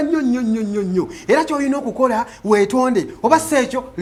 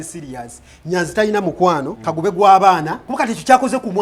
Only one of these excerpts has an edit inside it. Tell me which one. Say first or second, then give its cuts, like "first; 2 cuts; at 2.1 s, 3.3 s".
second; 2 cuts; at 2.0 s, 3.0 s